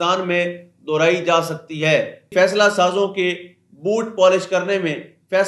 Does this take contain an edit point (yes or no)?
yes